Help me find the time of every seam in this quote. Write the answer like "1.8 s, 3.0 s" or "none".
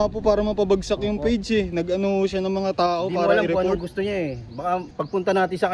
none

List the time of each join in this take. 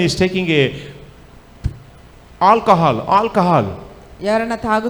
none

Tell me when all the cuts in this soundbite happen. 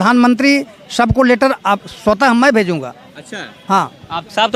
none

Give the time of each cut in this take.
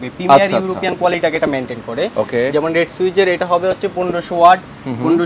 none

